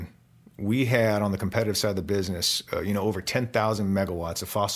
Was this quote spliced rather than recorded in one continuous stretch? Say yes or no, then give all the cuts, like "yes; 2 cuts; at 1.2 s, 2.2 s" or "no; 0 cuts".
no; 0 cuts